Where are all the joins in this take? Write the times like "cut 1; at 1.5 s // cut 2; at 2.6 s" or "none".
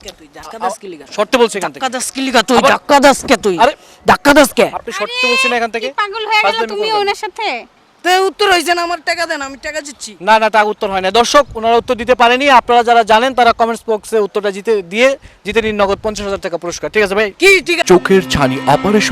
cut 1; at 17.8 s